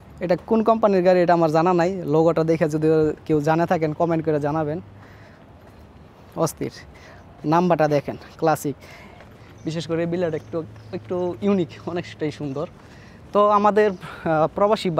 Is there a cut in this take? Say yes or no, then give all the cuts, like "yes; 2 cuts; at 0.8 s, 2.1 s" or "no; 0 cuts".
yes; 1 cut; at 9.2 s